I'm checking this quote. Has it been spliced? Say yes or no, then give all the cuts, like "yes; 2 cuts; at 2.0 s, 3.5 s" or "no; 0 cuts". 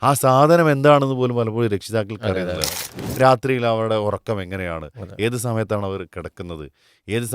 yes; 1 cut; at 2.9 s